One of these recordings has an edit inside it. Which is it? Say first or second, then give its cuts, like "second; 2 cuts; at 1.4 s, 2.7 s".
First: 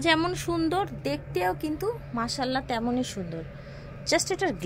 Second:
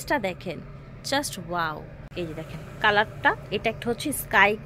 second; 1 cut; at 2.0 s